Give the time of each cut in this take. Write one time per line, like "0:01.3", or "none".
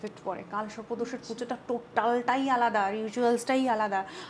none